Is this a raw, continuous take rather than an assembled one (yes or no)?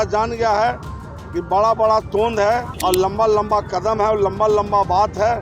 no